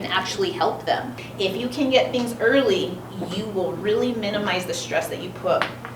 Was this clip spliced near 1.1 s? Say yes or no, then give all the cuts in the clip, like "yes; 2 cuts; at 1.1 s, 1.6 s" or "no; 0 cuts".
yes; 1 cut; at 1.1 s